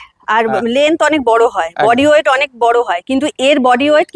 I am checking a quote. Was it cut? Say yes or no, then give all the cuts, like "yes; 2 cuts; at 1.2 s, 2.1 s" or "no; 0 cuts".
no; 0 cuts